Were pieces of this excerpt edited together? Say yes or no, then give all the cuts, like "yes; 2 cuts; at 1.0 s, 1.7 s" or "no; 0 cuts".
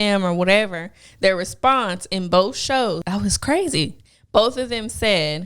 yes; 1 cut; at 3.0 s